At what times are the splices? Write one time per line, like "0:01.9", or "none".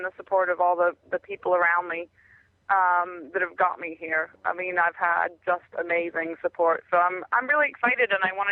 none